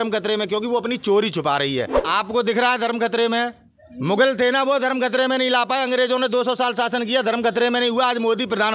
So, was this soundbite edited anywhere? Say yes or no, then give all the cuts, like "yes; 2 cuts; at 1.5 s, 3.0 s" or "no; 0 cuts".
yes; 1 cut; at 2.0 s